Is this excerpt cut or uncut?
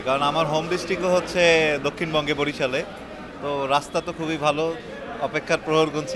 uncut